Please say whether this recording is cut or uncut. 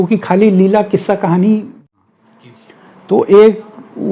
cut